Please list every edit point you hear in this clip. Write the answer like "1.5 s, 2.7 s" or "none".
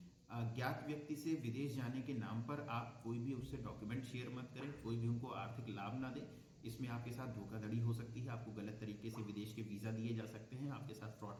none